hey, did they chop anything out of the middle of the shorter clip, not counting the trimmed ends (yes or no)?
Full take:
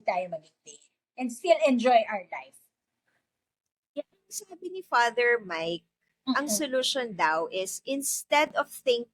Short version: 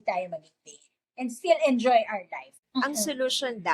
yes